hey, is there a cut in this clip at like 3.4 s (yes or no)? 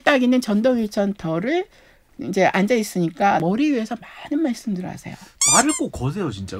yes